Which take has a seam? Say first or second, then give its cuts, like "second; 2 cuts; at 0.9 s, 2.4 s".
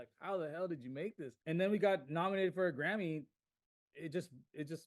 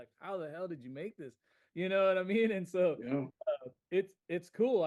first; 1 cut; at 1.3 s